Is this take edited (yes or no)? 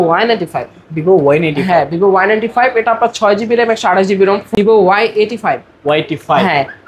yes